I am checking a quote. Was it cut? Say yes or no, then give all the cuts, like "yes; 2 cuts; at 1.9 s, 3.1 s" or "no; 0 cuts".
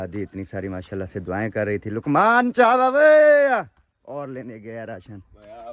no; 0 cuts